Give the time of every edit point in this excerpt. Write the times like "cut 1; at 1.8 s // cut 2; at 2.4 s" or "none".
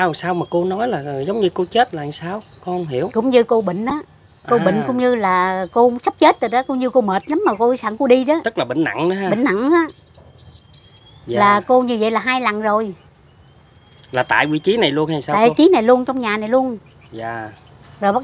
none